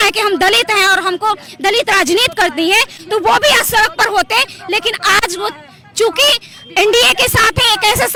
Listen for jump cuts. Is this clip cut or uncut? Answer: uncut